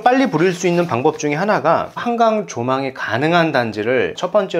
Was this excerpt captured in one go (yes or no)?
no